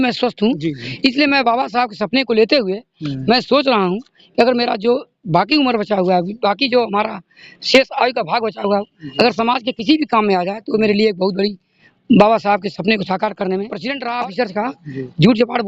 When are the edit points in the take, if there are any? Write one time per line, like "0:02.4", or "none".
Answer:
0:13.8